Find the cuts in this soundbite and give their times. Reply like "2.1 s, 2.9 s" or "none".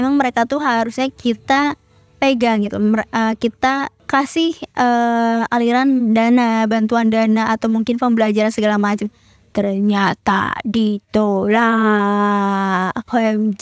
none

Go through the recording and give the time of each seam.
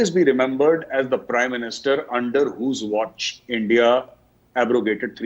none

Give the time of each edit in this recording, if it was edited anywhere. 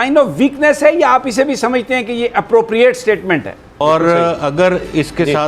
3.8 s

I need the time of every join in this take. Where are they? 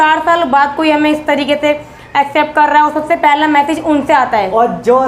none

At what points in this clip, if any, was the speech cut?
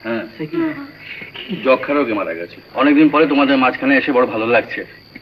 2.5 s

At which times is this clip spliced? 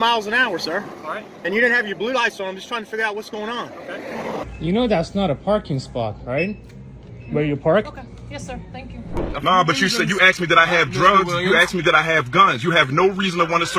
4.4 s, 9.3 s

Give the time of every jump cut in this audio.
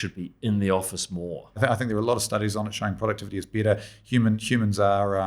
1.5 s

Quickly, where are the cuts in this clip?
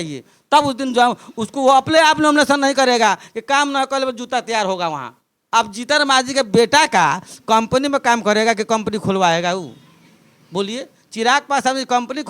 5.3 s

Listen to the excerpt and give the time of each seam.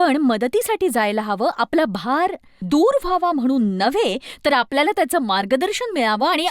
2.5 s

